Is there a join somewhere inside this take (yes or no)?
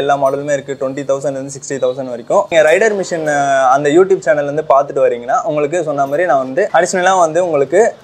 yes